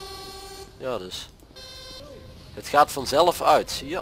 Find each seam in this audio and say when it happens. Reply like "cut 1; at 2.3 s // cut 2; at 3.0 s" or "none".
cut 1; at 2.0 s